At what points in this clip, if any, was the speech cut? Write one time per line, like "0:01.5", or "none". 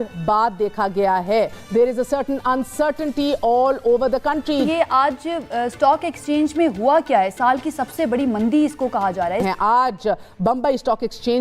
0:01.6
0:04.6
0:09.4

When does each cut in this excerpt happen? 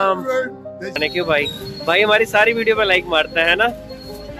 0:01.0

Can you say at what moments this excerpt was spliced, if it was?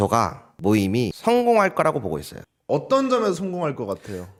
none

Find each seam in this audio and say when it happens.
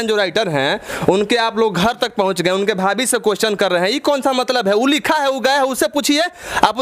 none

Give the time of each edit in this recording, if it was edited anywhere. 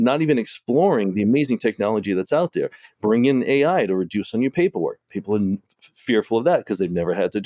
none

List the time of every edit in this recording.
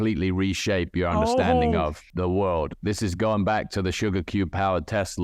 0:02.0

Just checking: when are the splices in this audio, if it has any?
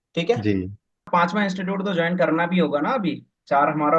0:01.1

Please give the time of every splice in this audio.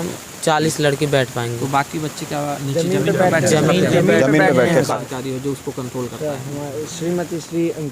0:05.0

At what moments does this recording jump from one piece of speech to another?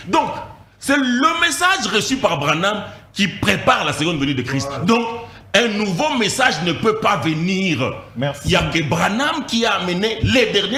none

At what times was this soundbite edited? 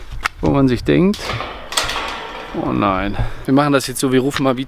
0:03.3

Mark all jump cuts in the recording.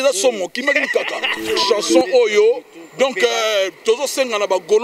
0:01.5

